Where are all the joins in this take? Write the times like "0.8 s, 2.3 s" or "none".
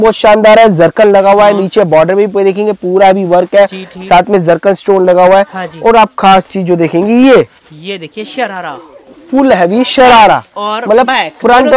none